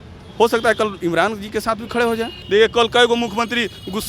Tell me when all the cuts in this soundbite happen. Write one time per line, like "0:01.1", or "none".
0:02.3